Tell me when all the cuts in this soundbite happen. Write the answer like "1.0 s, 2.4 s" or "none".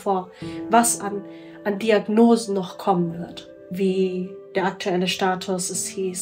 3.7 s